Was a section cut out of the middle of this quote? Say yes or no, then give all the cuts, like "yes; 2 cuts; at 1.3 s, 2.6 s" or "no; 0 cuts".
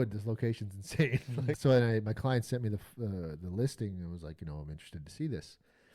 yes; 1 cut; at 1.5 s